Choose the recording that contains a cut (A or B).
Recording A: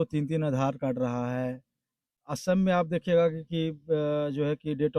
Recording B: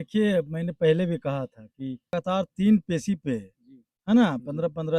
B